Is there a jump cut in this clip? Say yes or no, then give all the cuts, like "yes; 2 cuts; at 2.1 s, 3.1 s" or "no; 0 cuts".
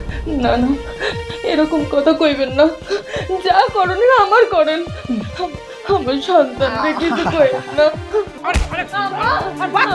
yes; 1 cut; at 8.4 s